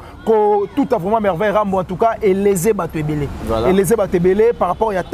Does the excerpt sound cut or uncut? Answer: uncut